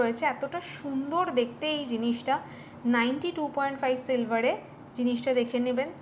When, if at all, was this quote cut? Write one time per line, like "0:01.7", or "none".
none